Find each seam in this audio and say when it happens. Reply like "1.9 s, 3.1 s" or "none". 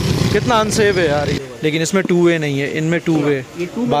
1.4 s